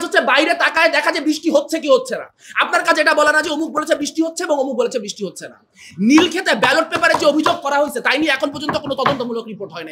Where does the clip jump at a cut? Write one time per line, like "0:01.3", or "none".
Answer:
none